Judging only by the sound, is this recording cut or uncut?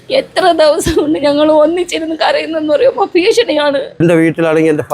cut